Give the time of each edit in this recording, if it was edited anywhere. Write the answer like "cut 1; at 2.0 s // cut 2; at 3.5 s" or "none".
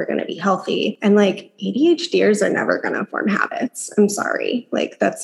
cut 1; at 1.0 s